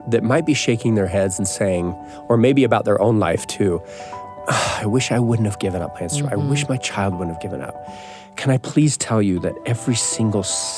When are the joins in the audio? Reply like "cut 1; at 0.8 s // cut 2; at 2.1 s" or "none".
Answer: none

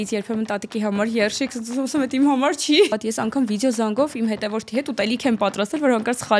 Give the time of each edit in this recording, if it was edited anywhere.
cut 1; at 2.9 s

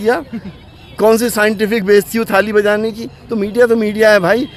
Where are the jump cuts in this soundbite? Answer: none

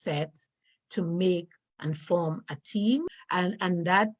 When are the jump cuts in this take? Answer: cut 1; at 3.2 s

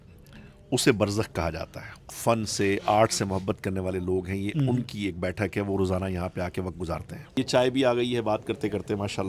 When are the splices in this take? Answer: cut 1; at 2.1 s // cut 2; at 7.2 s

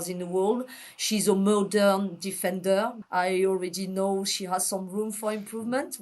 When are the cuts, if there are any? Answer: cut 1; at 3.0 s

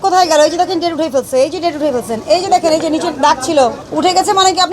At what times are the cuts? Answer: cut 1; at 3.8 s

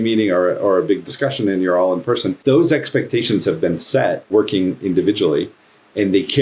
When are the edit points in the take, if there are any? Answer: cut 1; at 2.4 s // cut 2; at 4.3 s

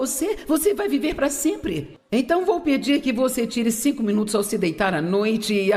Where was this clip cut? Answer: cut 1; at 1.9 s

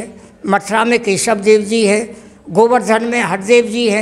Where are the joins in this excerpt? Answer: none

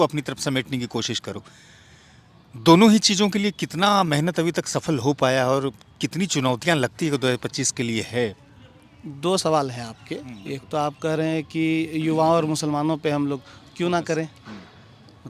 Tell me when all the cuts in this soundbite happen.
none

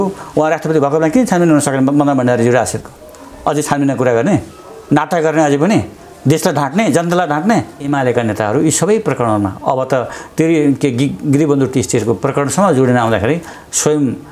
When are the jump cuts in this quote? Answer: cut 1; at 7.9 s

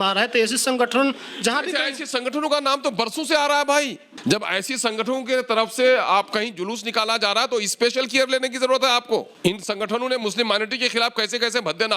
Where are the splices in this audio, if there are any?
cut 1; at 4.0 s // cut 2; at 9.3 s

